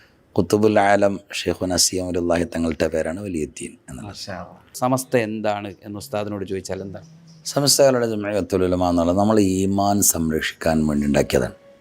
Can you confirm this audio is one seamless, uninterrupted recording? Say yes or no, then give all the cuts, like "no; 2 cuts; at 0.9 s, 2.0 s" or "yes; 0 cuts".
no; 1 cut; at 4.7 s